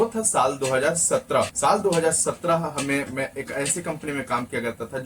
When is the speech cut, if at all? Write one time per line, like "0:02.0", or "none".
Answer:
0:01.5